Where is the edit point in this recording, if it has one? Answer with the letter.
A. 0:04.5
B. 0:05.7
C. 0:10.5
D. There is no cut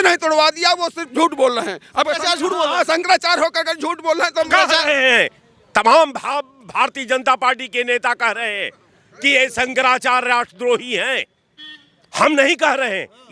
A